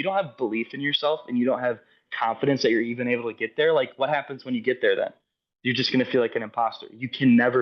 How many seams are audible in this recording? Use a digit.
0